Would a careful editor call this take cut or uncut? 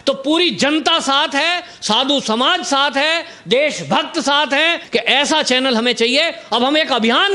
cut